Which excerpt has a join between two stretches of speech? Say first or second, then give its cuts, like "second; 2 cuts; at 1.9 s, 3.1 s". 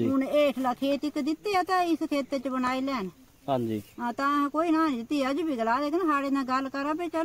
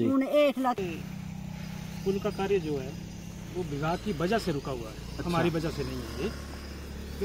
second; 2 cuts; at 0.8 s, 5.6 s